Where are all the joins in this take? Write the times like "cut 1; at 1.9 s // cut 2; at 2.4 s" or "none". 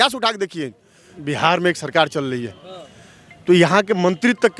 cut 1; at 1.1 s